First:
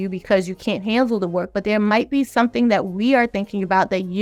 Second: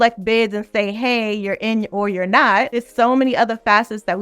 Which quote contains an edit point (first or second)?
second